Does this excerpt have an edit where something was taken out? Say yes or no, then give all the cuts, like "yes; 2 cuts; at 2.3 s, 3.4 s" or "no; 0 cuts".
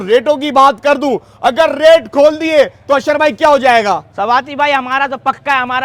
no; 0 cuts